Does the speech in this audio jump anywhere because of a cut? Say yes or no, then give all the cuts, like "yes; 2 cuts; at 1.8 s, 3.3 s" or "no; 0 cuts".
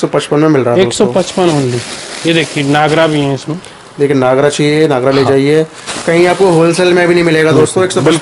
no; 0 cuts